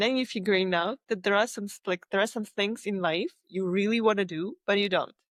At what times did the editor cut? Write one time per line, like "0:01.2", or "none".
none